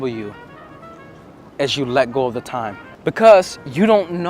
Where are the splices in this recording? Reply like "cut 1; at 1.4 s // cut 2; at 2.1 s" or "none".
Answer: cut 1; at 2.8 s